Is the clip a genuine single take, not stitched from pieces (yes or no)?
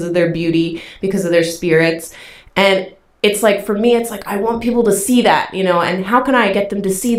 yes